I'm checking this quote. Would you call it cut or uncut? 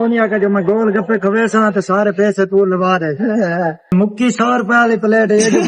cut